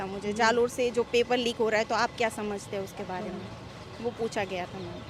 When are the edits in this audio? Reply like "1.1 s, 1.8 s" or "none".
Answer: none